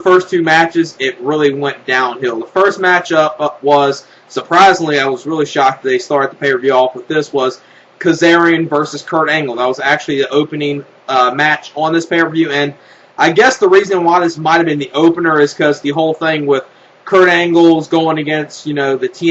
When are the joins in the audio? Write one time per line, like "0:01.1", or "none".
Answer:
0:06.3